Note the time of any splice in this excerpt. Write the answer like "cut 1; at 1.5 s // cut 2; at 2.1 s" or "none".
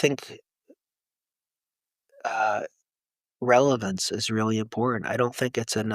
none